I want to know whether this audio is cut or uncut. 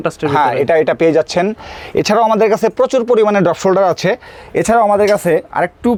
uncut